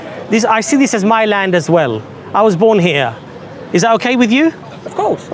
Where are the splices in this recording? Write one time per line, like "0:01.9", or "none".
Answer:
none